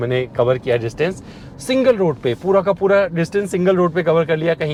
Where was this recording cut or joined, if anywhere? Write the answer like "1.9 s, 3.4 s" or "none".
none

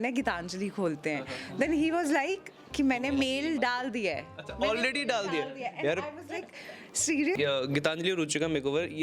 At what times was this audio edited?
7.4 s

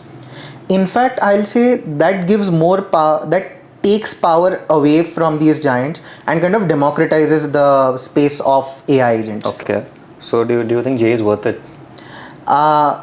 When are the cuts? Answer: 9.6 s

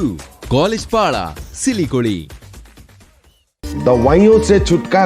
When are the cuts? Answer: none

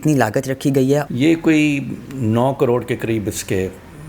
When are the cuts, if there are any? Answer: 1.1 s

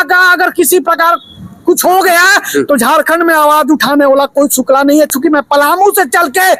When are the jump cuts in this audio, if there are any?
none

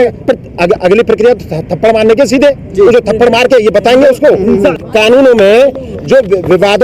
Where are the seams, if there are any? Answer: 4.8 s

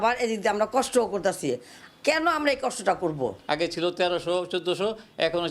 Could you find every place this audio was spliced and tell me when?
3.4 s

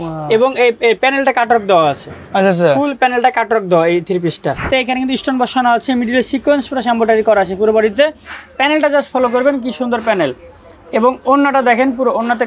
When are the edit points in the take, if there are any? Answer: 4.6 s

